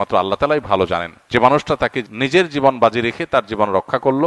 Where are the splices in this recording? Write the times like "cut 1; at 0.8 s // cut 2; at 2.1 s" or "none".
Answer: cut 1; at 1.1 s // cut 2; at 2.0 s